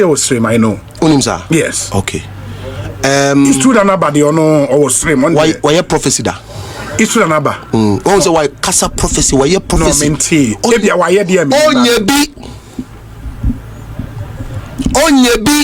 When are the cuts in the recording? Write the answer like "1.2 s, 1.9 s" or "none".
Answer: none